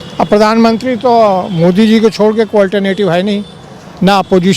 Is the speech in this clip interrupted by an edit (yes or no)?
no